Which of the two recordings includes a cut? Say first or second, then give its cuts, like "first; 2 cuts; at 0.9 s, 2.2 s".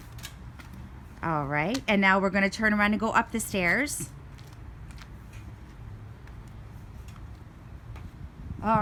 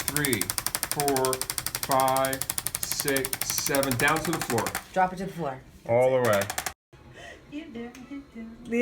second; 1 cut; at 6.8 s